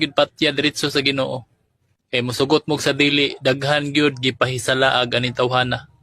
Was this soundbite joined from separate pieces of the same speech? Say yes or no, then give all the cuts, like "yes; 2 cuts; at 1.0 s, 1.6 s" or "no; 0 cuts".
no; 0 cuts